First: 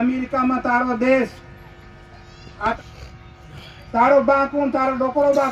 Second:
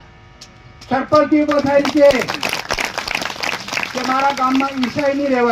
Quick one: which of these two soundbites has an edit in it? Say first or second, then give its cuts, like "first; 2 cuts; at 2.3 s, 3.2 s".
first; 1 cut; at 2.8 s